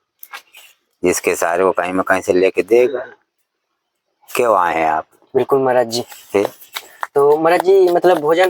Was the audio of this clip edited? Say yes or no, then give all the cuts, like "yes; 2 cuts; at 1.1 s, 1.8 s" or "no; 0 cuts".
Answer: no; 0 cuts